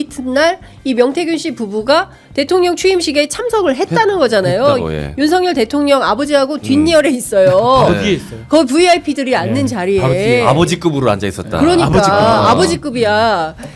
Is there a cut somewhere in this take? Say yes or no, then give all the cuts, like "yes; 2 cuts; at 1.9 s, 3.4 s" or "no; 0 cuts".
no; 0 cuts